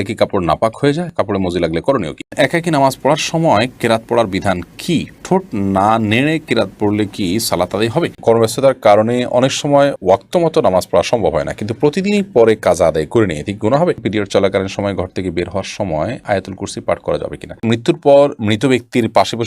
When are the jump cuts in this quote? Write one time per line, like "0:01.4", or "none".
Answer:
0:02.3
0:08.2
0:14.0
0:17.6